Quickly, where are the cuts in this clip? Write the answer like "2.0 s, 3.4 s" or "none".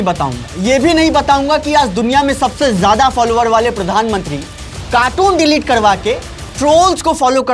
none